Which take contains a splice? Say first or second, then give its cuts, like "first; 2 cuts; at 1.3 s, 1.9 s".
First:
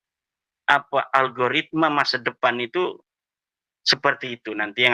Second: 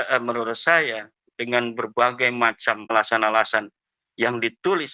second; 1 cut; at 2.9 s